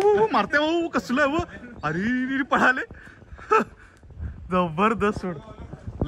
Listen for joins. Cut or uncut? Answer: uncut